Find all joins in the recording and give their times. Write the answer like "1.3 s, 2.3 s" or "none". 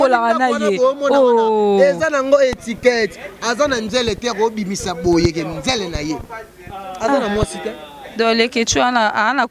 none

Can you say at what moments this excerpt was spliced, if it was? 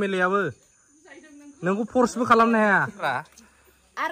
3.0 s

